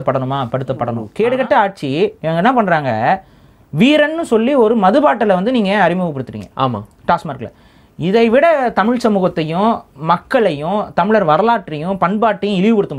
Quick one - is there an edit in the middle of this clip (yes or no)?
yes